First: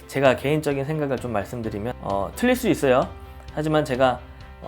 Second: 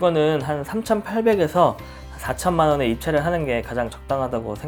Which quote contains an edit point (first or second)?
first